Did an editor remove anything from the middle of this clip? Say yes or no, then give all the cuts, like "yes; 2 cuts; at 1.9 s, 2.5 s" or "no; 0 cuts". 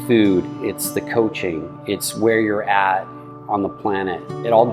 no; 0 cuts